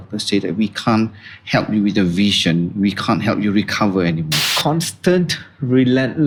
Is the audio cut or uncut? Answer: uncut